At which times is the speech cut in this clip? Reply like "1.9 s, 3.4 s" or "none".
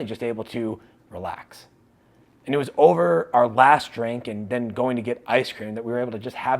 none